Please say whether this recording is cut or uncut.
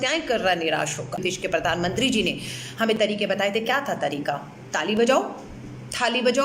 cut